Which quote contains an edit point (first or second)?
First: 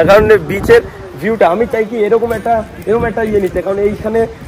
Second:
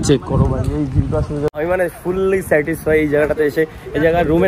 second